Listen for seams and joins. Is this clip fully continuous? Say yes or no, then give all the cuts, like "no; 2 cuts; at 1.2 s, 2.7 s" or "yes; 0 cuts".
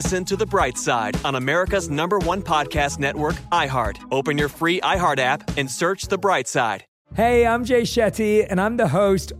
no; 1 cut; at 6.9 s